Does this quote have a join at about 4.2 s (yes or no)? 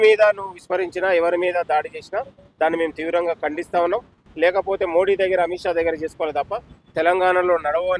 yes